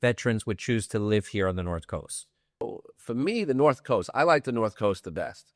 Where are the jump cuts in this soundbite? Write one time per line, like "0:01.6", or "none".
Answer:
0:02.6